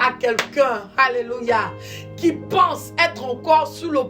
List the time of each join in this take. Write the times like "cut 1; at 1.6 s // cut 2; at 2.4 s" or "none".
none